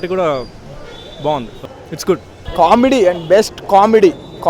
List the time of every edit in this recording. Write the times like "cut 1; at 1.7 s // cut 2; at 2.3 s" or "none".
cut 1; at 2.4 s